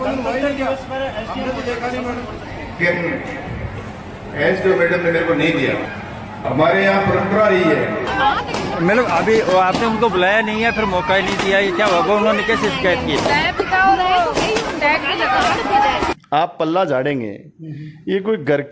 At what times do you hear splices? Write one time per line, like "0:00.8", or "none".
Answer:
0:02.8
0:08.1
0:16.1